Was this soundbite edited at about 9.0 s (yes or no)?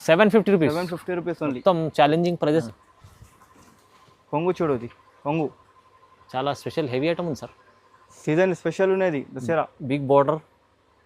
no